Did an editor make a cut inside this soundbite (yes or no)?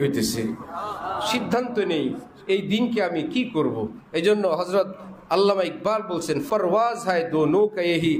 yes